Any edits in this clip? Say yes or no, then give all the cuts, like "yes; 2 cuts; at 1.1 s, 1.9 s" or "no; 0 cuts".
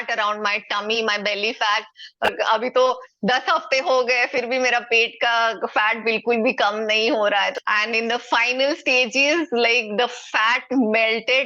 yes; 2 cuts; at 2.3 s, 7.6 s